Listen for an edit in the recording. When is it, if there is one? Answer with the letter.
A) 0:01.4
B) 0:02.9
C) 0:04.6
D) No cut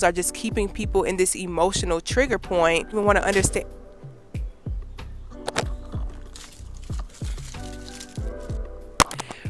B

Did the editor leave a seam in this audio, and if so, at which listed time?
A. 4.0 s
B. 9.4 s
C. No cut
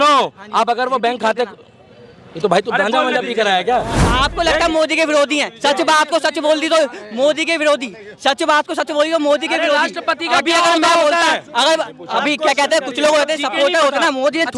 A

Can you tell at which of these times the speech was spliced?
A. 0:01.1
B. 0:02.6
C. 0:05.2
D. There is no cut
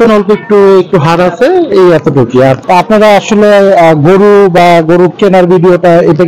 B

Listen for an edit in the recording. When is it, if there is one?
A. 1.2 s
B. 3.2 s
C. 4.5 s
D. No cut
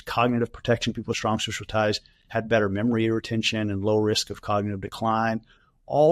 A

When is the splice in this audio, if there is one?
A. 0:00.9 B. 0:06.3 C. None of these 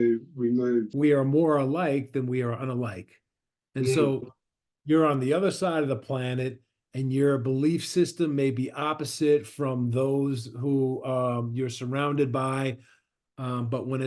A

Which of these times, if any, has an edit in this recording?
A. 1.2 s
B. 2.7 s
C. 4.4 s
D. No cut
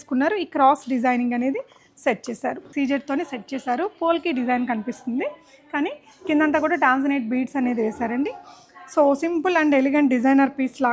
B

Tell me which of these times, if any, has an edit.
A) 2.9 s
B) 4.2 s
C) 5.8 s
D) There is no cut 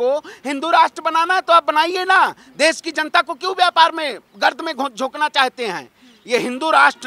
D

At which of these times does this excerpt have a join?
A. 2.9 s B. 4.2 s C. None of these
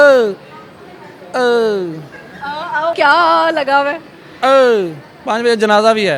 A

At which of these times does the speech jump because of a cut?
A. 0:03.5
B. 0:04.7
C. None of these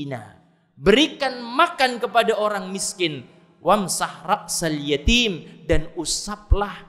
C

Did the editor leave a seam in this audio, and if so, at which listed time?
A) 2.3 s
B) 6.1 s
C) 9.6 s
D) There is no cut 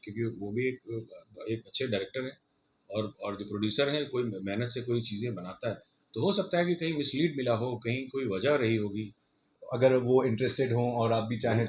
C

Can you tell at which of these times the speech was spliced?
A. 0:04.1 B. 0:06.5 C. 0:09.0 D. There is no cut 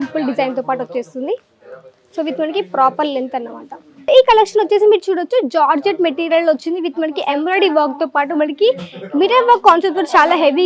A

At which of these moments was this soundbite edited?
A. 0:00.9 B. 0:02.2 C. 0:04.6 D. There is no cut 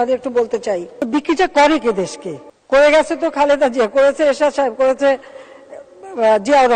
A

